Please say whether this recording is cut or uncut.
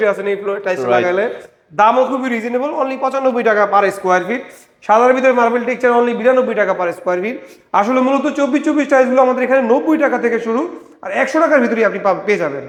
uncut